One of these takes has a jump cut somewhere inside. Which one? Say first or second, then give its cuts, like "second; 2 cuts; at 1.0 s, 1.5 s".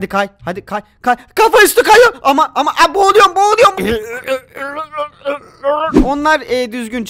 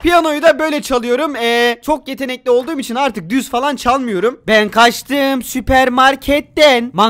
first; 1 cut; at 5.9 s